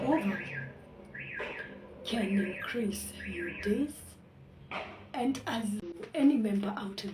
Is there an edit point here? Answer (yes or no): yes